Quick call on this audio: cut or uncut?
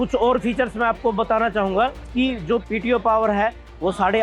cut